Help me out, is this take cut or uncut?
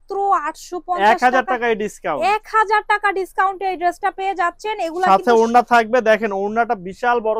uncut